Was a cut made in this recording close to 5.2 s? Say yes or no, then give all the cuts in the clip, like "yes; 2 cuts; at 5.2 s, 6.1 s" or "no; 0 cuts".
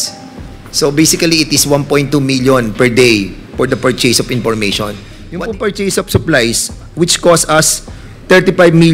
yes; 1 cut; at 5.2 s